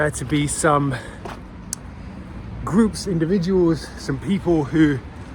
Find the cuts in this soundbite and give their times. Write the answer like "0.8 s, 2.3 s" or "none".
none